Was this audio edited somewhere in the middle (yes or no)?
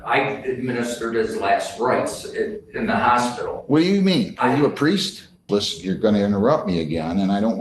yes